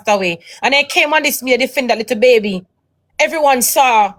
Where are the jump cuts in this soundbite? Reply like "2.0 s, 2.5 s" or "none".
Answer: none